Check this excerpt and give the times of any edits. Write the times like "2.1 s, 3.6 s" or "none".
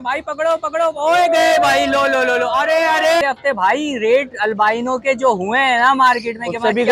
3.2 s